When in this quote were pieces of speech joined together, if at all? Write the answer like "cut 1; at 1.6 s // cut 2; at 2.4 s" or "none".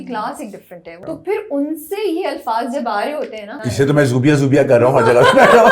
cut 1; at 1.0 s // cut 2; at 3.6 s